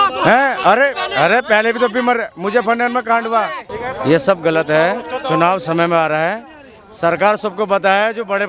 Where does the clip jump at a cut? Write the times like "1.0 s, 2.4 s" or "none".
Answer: 3.8 s

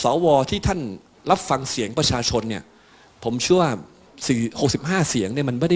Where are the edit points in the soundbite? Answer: 1.1 s, 4.1 s

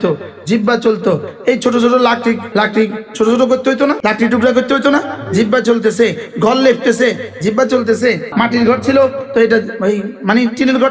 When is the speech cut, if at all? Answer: 2.4 s, 4.0 s, 8.3 s

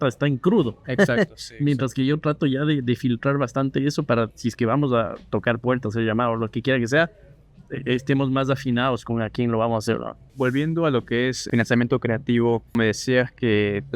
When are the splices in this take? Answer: 10.3 s

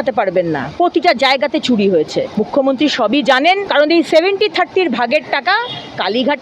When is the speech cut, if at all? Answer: 2.3 s, 3.7 s

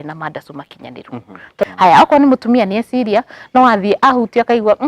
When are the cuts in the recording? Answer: 1.6 s

